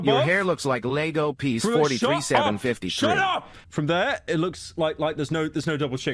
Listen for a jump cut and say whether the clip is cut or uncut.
cut